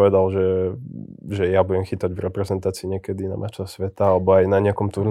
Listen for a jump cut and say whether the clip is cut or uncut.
uncut